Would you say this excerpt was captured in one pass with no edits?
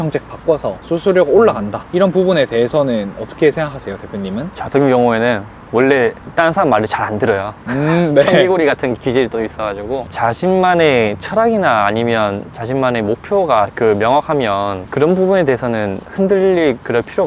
yes; 0 cuts

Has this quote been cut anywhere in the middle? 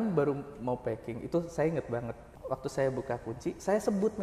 yes; 1 cut; at 2.4 s

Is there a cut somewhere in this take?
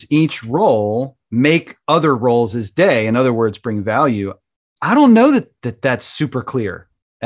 no; 0 cuts

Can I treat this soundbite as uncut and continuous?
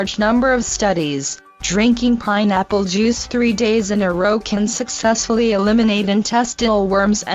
no; 1 cut; at 4.0 s

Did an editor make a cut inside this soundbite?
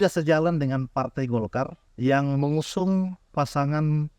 yes; 1 cut; at 1.8 s

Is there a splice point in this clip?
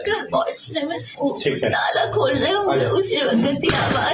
yes; 1 cut; at 1.1 s

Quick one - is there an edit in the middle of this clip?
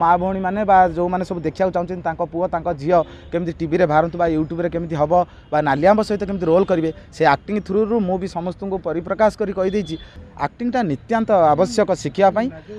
yes; 1 cut; at 10.2 s

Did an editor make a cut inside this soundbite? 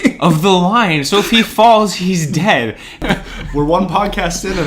yes; 1 cut; at 3.0 s

